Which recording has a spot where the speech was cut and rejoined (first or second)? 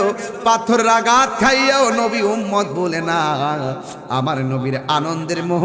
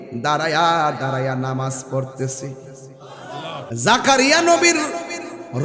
second